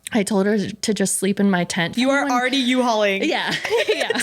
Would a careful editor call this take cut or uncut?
cut